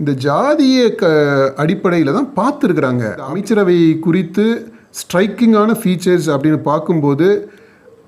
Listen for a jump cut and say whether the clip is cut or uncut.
cut